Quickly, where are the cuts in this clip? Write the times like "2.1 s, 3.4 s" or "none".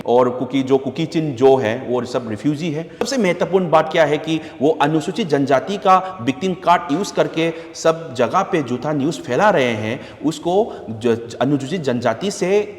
3.1 s